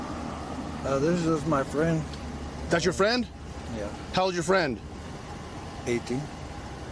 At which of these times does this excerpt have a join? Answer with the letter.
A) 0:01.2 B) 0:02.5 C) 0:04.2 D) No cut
D